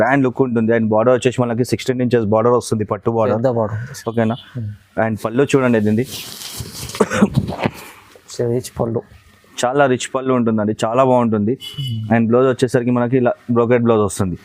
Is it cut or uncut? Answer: uncut